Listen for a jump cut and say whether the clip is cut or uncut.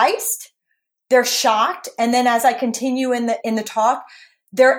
cut